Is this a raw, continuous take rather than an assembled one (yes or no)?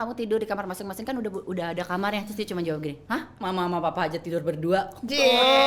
yes